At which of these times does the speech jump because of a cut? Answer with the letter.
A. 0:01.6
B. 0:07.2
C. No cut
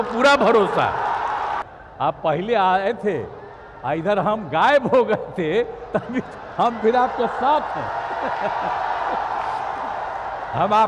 A